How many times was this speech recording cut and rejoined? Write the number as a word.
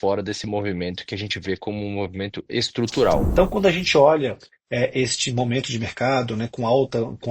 one